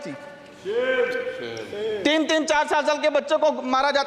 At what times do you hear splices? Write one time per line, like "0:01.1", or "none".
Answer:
none